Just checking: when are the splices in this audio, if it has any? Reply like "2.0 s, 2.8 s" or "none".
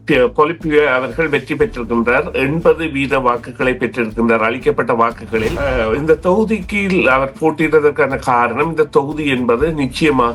5.6 s

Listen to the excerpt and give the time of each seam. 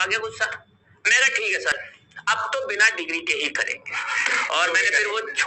1.7 s

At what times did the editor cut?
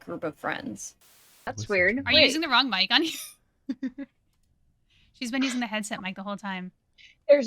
0.9 s

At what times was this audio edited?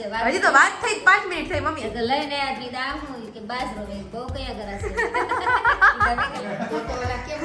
6.4 s

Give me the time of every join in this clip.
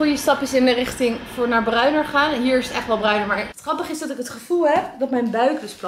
3.5 s

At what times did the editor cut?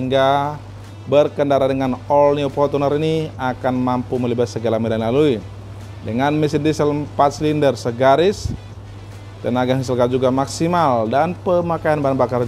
none

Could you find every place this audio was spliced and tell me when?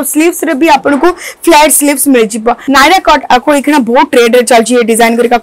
2.6 s

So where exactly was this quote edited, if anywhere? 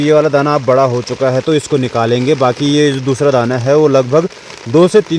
none

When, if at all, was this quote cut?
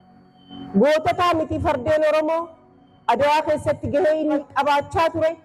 4.4 s

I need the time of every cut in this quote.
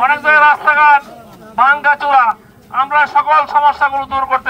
none

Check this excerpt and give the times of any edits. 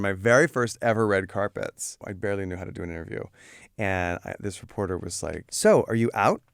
2.1 s, 5.5 s

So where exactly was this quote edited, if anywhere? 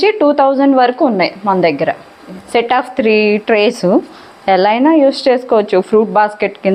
2.4 s

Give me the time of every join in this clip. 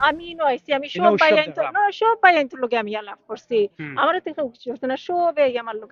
none

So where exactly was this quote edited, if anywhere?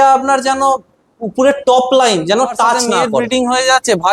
3.2 s

